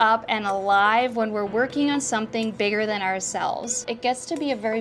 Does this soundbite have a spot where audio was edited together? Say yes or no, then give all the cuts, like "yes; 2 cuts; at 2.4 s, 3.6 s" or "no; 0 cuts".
yes; 1 cut; at 3.8 s